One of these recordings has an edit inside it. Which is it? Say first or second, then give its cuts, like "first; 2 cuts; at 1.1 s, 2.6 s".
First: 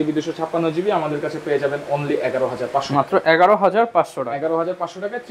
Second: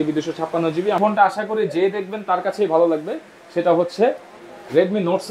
second; 1 cut; at 1.0 s